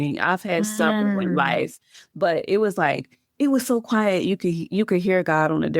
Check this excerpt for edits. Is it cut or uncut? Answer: uncut